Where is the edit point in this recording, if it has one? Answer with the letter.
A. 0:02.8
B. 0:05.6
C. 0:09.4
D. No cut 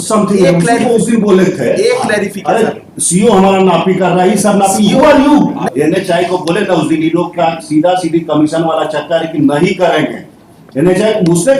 B